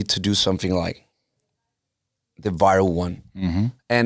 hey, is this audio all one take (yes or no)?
yes